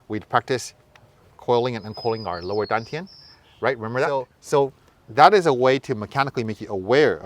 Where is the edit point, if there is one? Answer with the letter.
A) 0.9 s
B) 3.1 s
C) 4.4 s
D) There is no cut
C